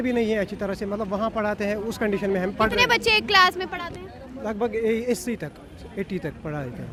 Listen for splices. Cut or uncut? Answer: uncut